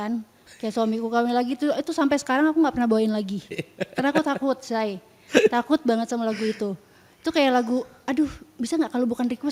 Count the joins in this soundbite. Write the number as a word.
zero